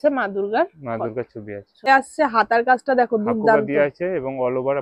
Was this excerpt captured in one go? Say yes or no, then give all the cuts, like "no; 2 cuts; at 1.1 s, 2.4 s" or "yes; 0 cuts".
no; 1 cut; at 1.9 s